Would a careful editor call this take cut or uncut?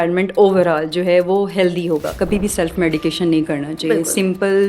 cut